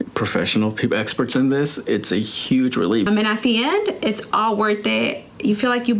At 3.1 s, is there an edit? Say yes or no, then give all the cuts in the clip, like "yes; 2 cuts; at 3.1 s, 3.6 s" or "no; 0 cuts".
yes; 1 cut; at 3.1 s